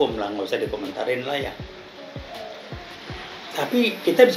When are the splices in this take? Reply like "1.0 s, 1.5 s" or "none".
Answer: none